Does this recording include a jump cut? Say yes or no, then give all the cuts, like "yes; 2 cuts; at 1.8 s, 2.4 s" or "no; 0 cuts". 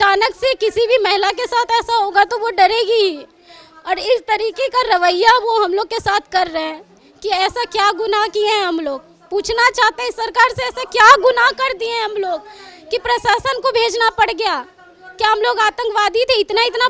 no; 0 cuts